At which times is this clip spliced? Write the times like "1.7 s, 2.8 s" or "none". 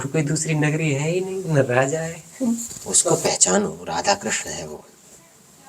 3.1 s